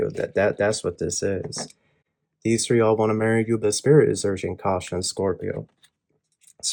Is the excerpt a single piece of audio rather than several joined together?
yes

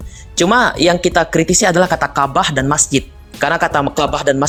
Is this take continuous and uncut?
yes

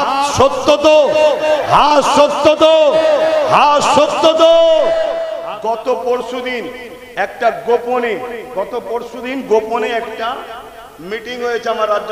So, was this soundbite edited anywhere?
yes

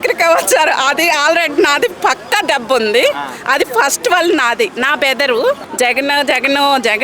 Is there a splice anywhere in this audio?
yes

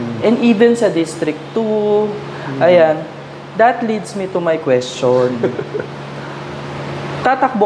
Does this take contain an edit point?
no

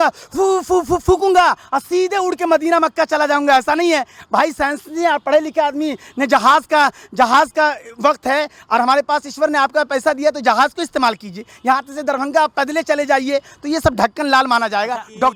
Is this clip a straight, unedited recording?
yes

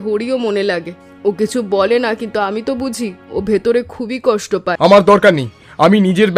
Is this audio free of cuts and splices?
no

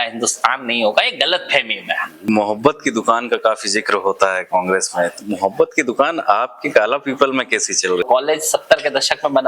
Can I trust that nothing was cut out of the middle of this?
no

